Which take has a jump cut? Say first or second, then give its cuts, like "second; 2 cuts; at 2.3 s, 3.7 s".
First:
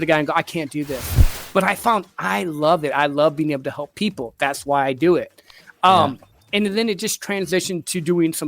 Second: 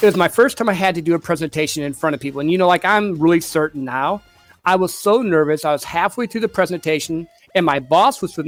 first; 1 cut; at 1.3 s